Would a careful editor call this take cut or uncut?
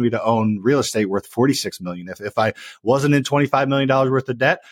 uncut